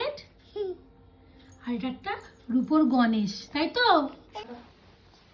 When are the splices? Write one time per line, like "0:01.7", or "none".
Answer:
0:04.3